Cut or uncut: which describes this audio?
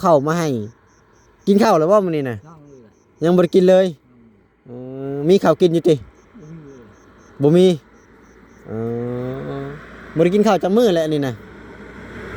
uncut